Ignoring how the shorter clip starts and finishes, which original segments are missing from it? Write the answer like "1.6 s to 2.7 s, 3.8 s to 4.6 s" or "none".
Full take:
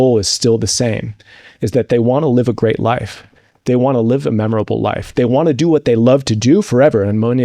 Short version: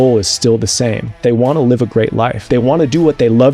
1.2 s to 1.9 s, 3.1 s to 5.1 s